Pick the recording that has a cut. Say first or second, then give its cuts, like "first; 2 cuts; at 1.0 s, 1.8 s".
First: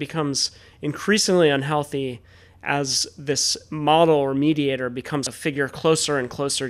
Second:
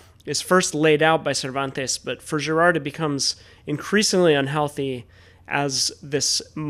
first; 1 cut; at 5.3 s